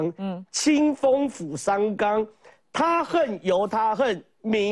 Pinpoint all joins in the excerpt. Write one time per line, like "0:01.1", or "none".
none

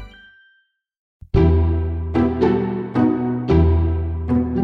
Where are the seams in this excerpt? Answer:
0:01.3

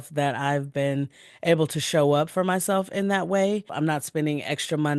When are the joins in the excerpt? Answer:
0:03.7

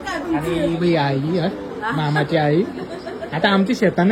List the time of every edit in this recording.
none

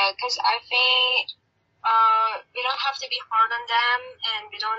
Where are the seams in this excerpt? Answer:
none

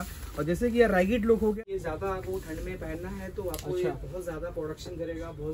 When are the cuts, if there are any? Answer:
0:01.8

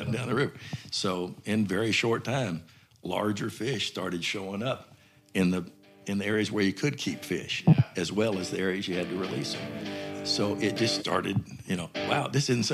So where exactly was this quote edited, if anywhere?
none

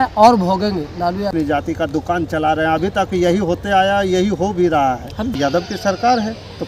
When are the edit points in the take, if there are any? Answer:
0:01.3
0:05.3

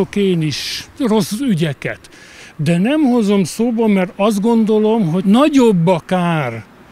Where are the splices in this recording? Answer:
0:00.9
0:05.2

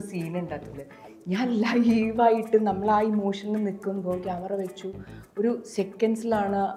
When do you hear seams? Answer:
none

